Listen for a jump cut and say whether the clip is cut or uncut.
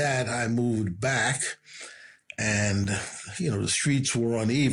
uncut